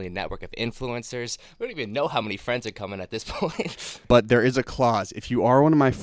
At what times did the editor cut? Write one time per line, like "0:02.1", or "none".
0:03.9

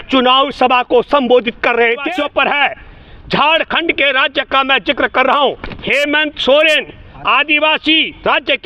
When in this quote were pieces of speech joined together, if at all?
0:02.1

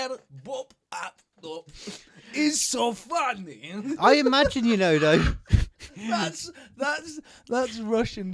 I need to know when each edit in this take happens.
none

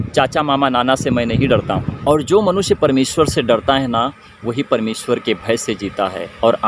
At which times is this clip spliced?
0:02.0

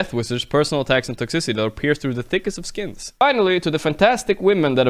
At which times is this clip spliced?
0:03.2

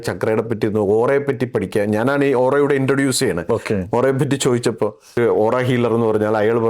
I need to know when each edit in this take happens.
0:05.2

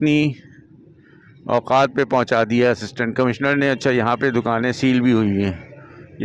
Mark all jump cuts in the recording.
none

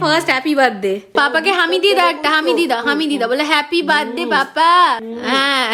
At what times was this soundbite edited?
none

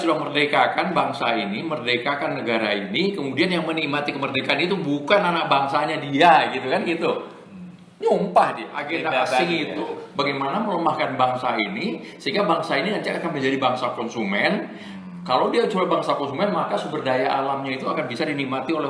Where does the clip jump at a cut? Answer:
0:08.8

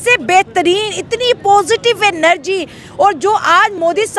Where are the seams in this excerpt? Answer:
none

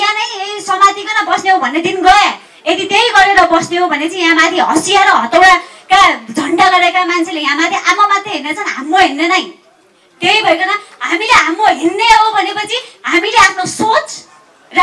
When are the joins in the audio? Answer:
none

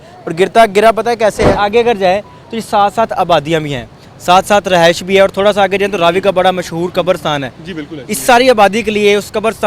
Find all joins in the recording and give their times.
0:01.6

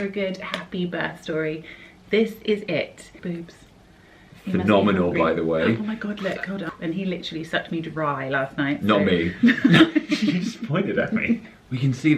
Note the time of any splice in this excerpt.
0:03.2
0:06.7
0:11.4

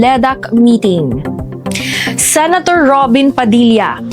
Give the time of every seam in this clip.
0:01.5

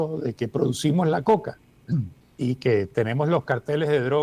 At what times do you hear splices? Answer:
0:02.2

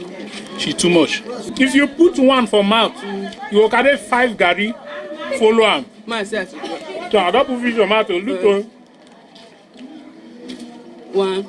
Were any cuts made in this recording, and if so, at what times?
0:01.5

